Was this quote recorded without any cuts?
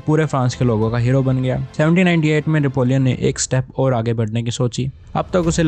yes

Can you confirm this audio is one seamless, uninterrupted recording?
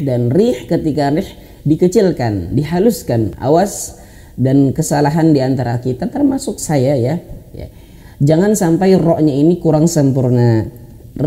no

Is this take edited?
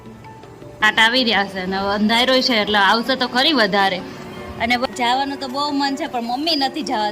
yes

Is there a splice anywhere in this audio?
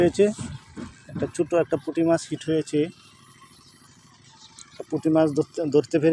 no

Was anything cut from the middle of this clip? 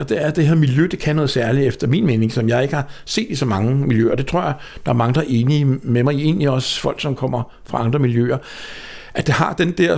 no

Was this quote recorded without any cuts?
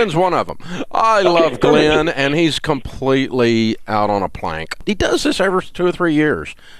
no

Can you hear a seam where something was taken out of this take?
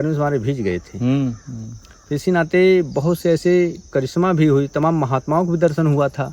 no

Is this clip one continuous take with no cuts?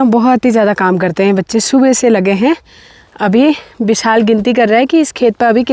yes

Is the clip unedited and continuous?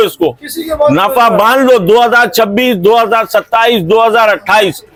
yes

